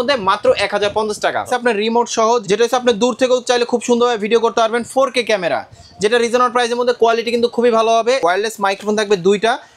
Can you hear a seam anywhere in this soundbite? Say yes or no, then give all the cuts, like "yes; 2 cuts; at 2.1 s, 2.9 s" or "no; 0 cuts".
yes; 3 cuts; at 1.5 s, 2.4 s, 8.2 s